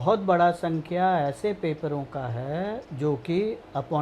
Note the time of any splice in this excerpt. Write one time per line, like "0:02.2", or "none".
0:02.9